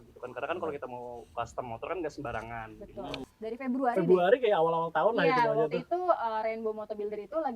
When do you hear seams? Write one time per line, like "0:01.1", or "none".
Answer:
0:03.3